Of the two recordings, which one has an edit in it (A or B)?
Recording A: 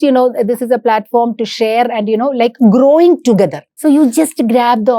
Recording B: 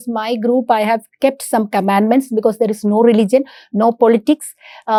A